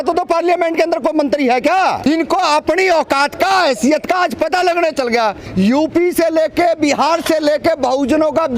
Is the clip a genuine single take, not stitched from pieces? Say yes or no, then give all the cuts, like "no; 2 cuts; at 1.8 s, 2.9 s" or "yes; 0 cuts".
no; 2 cuts; at 2.0 s, 5.4 s